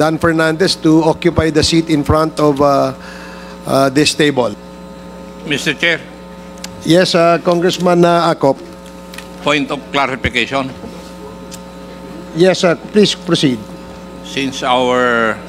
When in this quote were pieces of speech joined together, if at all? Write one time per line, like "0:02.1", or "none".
none